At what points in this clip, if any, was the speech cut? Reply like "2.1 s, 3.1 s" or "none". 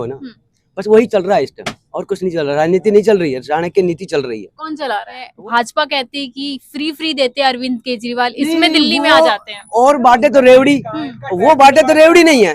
5.3 s